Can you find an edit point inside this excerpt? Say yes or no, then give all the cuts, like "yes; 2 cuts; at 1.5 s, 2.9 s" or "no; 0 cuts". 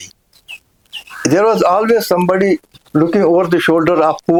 no; 0 cuts